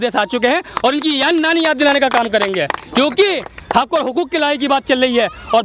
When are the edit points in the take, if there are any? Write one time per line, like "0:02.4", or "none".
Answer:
none